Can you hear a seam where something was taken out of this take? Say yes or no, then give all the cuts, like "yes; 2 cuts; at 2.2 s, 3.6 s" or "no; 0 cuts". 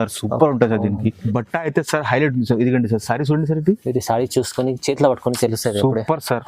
yes; 1 cut; at 1.2 s